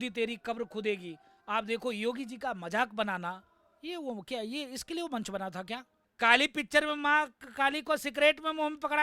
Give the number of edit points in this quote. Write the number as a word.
one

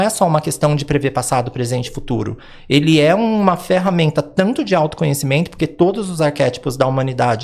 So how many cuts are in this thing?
zero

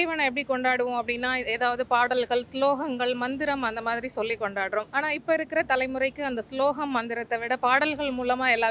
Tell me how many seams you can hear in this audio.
one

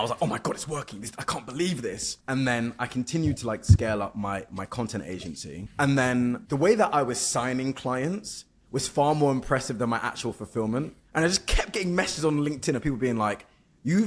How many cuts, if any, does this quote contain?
four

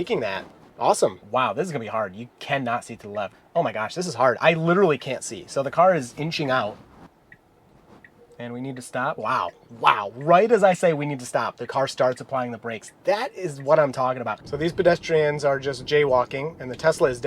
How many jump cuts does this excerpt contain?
four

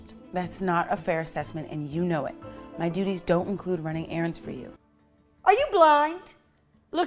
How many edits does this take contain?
one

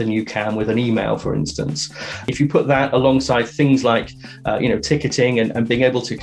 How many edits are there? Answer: one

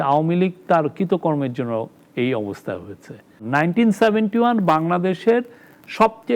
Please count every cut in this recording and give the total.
one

